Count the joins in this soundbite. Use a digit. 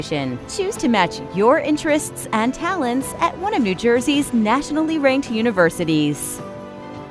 1